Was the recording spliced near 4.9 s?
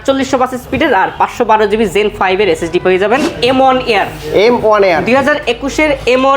no; 1 cut; at 3.3 s

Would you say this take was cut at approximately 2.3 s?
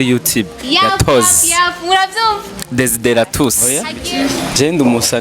no; 1 cut; at 3.9 s

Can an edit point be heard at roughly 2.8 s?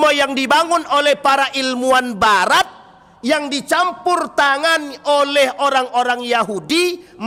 no; 0 cuts

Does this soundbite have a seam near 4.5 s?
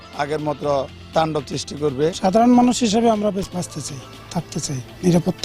no; 1 cut; at 2.2 s

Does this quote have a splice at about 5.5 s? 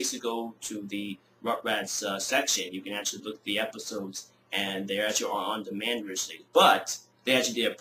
yes; 1 cut; at 5.5 s

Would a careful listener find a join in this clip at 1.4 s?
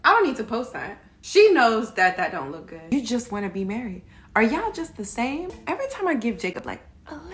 no; 2 cuts; at 2.8 s, 5.6 s

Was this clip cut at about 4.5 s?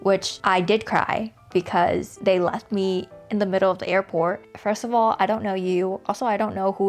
yes; 1 cut; at 4.5 s

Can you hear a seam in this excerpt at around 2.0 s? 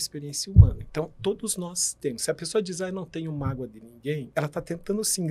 no; 1 cut; at 4.2 s

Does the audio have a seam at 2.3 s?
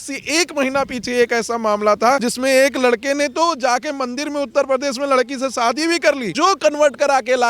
yes; 2 cuts; at 2.3 s, 6.3 s

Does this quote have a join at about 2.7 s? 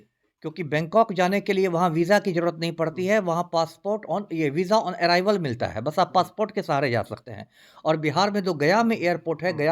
no; 0 cuts

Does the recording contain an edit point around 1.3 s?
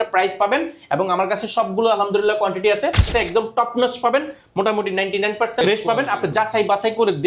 no; 2 cuts; at 3.1 s, 5.6 s

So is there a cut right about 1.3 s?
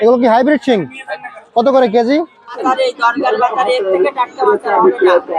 no; 1 cut; at 2.6 s

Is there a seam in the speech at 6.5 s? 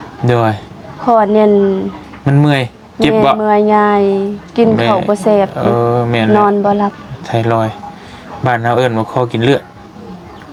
no; 0 cuts

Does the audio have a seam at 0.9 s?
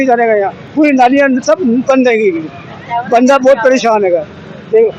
no; 0 cuts

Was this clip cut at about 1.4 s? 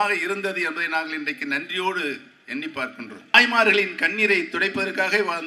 no; 1 cut; at 3.3 s

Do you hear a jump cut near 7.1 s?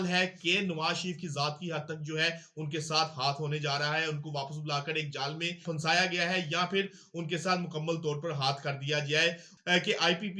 no; 2 cuts; at 5.6 s, 9.5 s

